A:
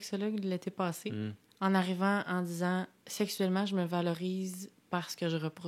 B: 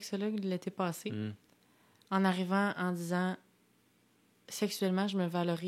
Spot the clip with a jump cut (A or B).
A